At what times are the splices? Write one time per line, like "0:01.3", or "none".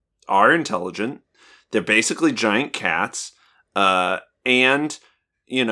none